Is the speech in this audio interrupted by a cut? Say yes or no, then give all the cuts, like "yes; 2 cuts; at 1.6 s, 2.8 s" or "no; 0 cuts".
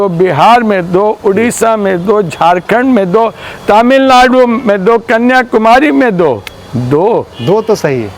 no; 0 cuts